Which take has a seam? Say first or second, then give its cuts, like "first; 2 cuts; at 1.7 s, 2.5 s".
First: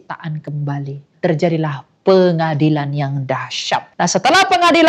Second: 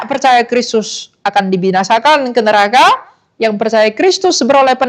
first; 2 cuts; at 1.1 s, 3.9 s